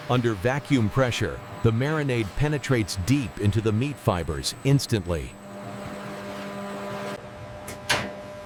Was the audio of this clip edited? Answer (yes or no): no